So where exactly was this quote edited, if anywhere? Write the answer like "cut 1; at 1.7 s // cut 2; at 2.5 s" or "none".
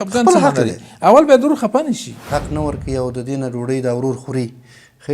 cut 1; at 2.3 s